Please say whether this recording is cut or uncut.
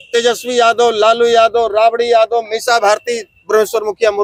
uncut